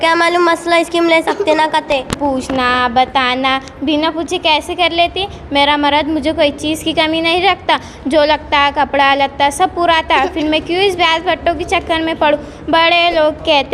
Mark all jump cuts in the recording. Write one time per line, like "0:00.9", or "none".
0:02.2